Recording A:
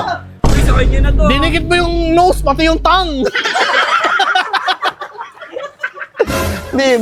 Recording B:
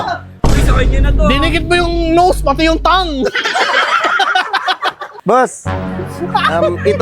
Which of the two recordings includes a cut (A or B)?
B